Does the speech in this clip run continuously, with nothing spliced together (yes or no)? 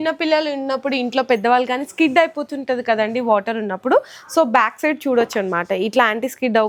yes